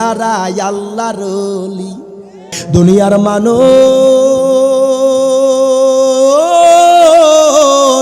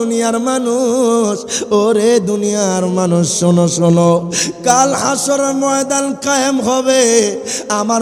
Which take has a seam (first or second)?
first